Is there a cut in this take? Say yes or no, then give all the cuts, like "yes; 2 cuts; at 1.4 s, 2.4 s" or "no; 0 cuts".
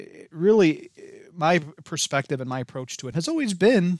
yes; 1 cut; at 3.1 s